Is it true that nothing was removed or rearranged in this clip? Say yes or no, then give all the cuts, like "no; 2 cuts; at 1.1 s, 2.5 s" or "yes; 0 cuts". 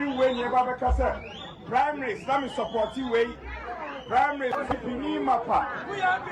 yes; 0 cuts